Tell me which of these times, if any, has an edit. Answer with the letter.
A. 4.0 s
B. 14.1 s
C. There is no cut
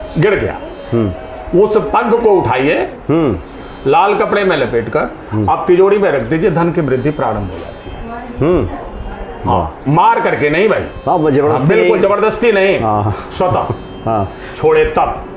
C